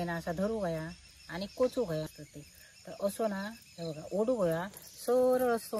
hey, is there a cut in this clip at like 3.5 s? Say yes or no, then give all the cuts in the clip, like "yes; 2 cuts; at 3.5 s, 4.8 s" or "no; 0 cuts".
no; 1 cut; at 2.1 s